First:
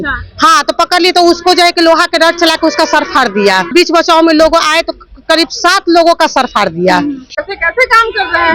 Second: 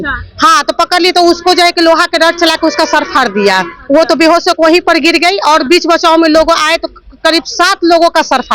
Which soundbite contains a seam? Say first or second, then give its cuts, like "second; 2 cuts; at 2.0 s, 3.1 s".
first; 2 cuts; at 3.7 s, 7.4 s